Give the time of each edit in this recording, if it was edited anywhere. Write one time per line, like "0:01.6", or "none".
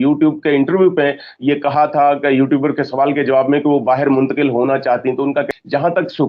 0:05.2